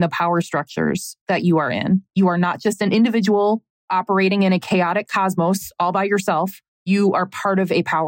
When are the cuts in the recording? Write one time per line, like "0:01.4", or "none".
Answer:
0:02.1
0:03.7
0:06.7